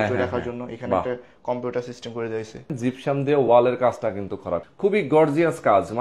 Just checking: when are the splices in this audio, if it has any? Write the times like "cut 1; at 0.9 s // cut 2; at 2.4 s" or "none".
cut 1; at 2.7 s // cut 2; at 4.7 s